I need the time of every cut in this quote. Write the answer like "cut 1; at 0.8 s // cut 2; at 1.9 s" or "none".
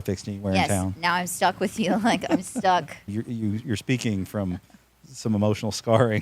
cut 1; at 3.1 s